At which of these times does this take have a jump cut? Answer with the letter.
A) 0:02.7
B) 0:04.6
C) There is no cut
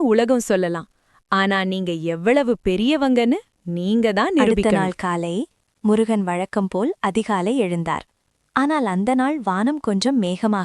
B